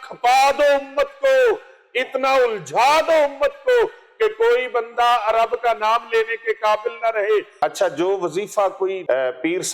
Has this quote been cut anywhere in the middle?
yes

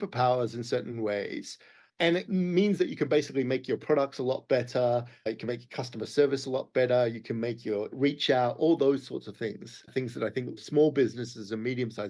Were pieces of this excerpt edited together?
yes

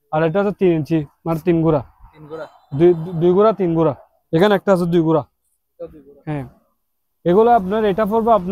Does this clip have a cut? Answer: no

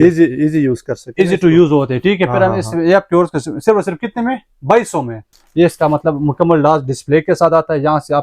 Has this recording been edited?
yes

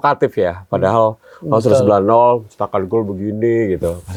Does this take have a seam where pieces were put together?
no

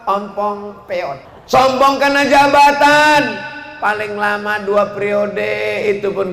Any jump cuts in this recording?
yes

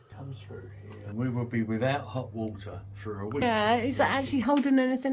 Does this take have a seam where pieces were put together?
yes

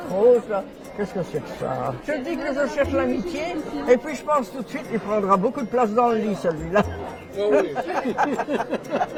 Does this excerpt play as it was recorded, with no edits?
yes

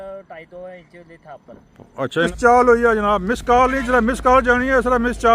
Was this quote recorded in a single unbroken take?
no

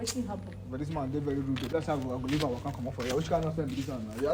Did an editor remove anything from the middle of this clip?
no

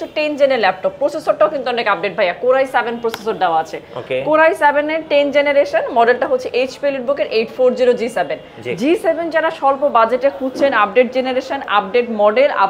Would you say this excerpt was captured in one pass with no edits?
yes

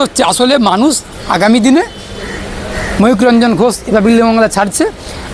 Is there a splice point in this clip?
no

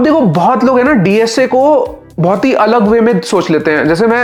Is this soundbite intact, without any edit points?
yes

